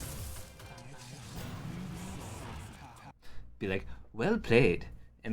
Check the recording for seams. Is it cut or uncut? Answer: cut